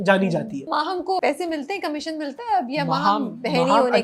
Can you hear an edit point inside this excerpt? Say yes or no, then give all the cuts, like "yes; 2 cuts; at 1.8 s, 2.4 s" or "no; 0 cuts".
yes; 1 cut; at 1.1 s